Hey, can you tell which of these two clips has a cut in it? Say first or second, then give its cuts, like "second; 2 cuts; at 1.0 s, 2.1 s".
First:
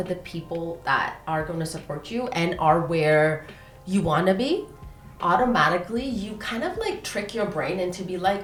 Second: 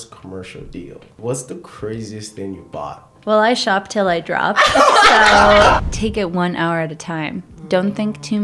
second; 3 cuts; at 1.2 s, 3.1 s, 5.8 s